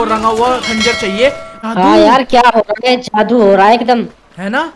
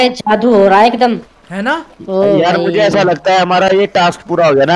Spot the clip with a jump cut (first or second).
first